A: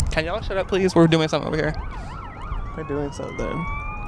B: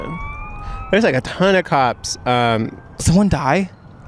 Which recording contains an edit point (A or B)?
B